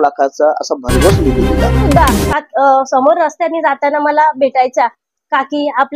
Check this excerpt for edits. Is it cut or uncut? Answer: cut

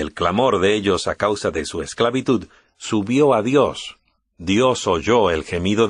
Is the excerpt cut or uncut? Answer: cut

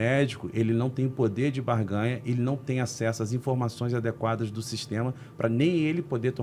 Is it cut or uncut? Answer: uncut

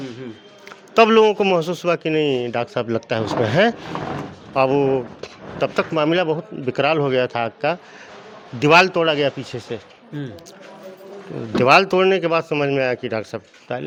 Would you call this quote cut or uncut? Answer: uncut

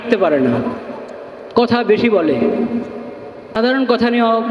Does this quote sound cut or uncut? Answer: cut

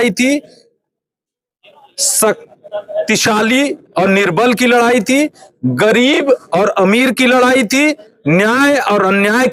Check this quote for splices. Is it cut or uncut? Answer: uncut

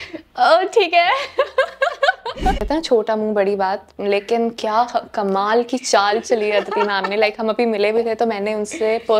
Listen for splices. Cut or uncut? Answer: cut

